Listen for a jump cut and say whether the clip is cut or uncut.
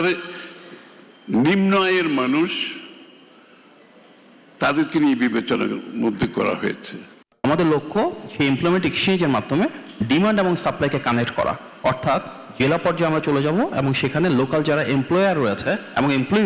cut